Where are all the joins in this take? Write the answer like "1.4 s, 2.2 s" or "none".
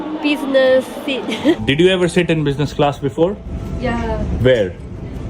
1.6 s, 4.4 s

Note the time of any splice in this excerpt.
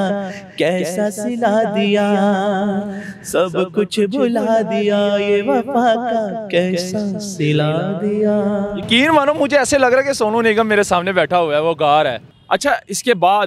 none

